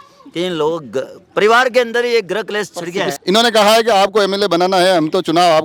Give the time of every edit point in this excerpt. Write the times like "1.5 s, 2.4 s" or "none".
3.1 s